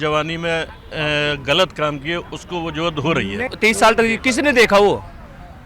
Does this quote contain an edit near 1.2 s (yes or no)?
no